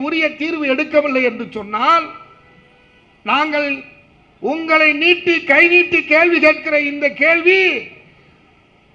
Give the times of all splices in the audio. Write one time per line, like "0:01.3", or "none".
none